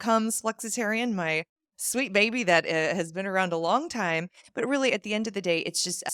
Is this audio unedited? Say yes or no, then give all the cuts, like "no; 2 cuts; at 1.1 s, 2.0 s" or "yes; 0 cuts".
yes; 0 cuts